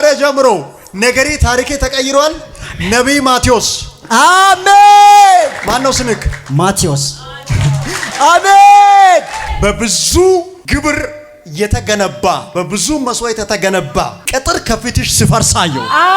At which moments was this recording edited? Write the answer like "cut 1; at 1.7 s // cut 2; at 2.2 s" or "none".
cut 1; at 5.6 s // cut 2; at 9.4 s // cut 3; at 10.6 s // cut 4; at 12.5 s // cut 5; at 14.2 s